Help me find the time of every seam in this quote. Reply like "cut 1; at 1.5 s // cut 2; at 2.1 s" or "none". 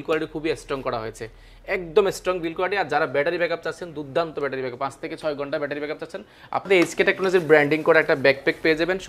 cut 1; at 6.7 s